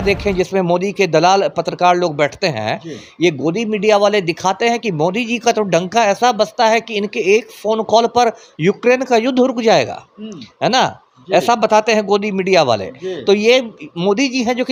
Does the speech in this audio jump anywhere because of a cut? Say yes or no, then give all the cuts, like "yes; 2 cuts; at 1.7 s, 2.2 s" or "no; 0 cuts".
no; 0 cuts